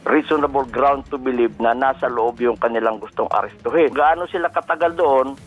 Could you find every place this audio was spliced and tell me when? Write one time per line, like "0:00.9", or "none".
0:03.9